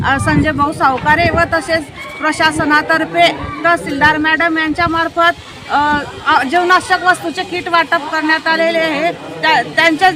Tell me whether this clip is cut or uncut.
uncut